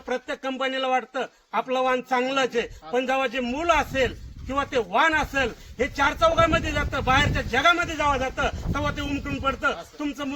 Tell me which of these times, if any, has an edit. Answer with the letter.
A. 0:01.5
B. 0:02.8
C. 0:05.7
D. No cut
D